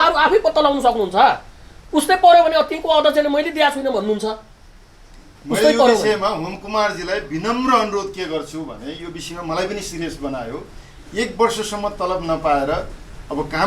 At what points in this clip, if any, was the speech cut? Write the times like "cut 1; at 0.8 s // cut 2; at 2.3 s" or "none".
none

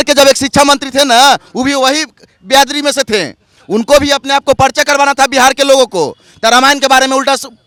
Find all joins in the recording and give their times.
none

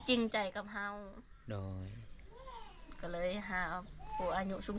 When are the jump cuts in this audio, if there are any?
none

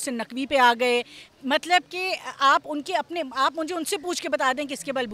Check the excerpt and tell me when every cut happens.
none

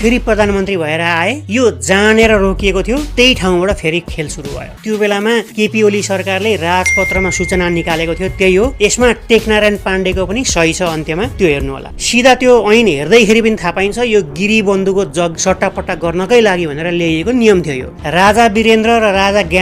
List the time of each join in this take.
cut 1; at 4.7 s // cut 2; at 11.8 s // cut 3; at 15.3 s // cut 4; at 18.0 s

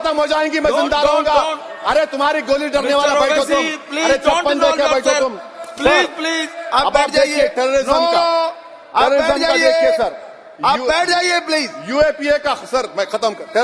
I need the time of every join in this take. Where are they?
none

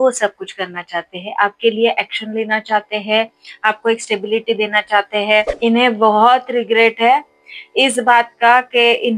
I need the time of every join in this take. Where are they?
cut 1; at 5.5 s

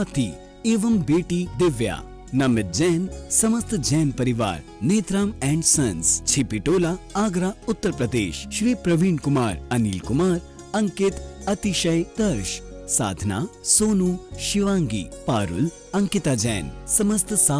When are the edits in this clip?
none

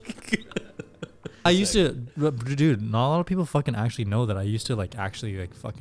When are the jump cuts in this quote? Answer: cut 1; at 1.5 s

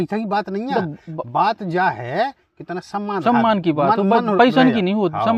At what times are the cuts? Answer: none

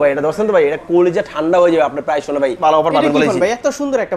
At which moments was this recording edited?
cut 1; at 2.6 s

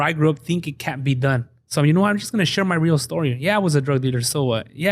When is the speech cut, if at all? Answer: cut 1; at 1.6 s

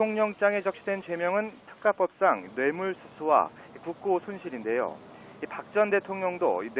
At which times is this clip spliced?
cut 1; at 5.8 s

